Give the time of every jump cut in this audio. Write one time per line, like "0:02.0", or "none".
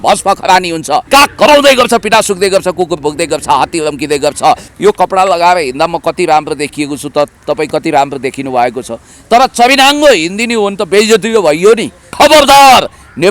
0:01.0
0:04.7
0:12.0